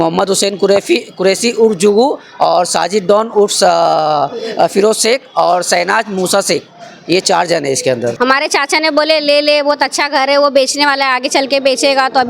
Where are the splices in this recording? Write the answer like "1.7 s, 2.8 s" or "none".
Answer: 8.1 s